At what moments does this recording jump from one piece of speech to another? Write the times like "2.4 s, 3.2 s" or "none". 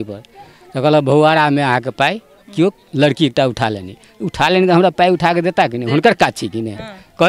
none

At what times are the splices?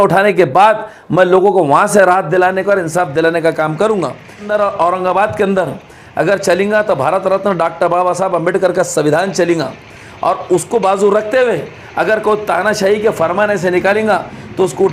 4.5 s

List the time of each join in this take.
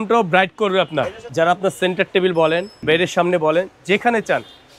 1.2 s, 2.7 s

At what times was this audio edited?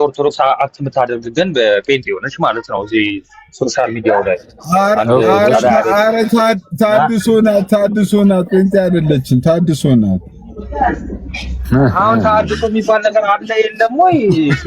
none

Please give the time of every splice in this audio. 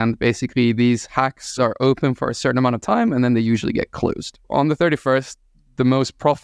1.6 s, 4.3 s

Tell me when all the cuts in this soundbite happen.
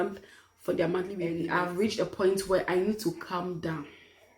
1.4 s

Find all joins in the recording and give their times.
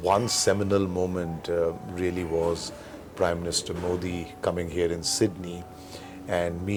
none

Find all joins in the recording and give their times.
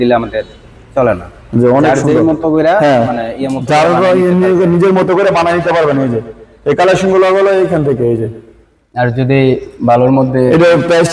none

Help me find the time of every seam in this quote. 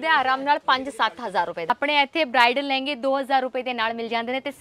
1.7 s

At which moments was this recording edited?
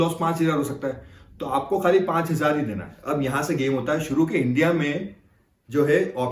none

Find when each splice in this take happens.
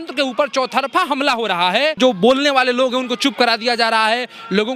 2.0 s

